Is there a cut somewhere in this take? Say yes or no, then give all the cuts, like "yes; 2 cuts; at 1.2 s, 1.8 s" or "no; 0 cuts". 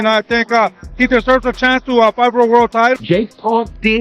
yes; 1 cut; at 3.0 s